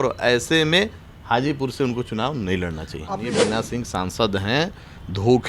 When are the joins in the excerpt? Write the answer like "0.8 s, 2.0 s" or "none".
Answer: 3.3 s